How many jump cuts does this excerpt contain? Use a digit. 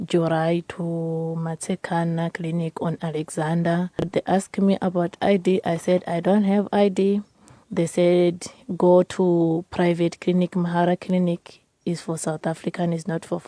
1